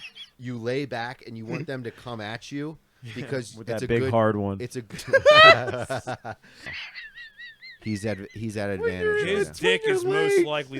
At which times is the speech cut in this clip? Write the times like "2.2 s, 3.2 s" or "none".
6.7 s